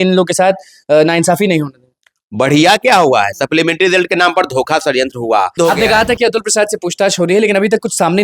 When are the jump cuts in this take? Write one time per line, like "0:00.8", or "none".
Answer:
0:05.5